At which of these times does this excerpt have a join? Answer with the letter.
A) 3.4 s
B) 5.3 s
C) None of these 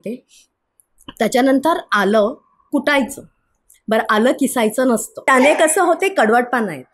C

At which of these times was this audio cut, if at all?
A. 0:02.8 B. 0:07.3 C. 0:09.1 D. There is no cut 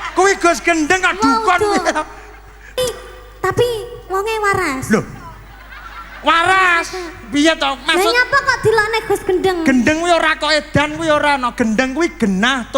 A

